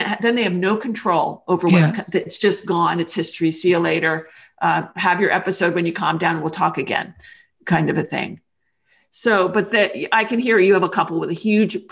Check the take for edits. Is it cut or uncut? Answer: uncut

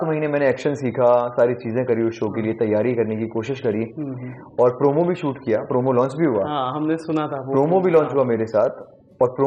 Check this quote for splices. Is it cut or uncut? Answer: uncut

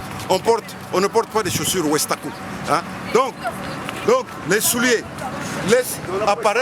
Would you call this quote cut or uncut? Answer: uncut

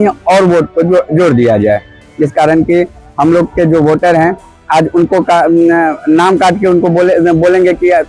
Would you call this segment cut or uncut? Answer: uncut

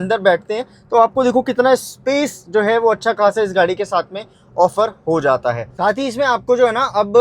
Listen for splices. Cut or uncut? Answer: cut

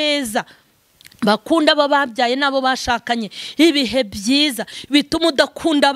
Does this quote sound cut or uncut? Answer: uncut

